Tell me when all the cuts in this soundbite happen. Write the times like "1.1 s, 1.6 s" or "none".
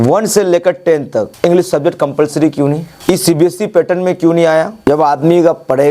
1.3 s, 2.9 s, 4.7 s